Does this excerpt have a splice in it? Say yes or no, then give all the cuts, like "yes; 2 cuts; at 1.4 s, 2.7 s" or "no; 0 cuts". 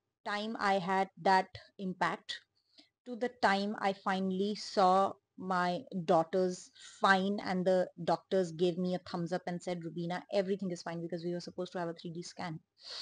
no; 0 cuts